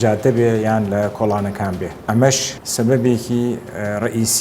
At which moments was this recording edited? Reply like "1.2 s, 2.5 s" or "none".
2.0 s, 2.6 s